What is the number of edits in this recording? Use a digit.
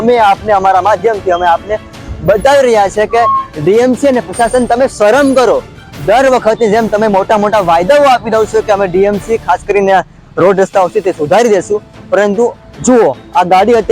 0